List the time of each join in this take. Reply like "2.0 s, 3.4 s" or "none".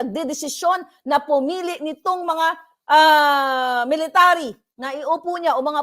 none